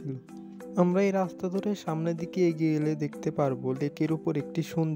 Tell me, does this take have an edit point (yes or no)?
no